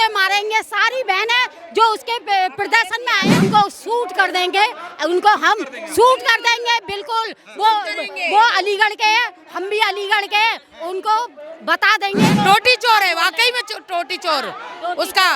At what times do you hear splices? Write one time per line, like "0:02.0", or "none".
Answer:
0:03.4
0:12.3